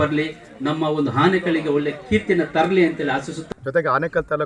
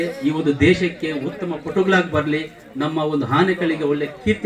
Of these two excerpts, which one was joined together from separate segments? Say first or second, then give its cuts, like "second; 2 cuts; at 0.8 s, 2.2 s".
first; 1 cut; at 3.4 s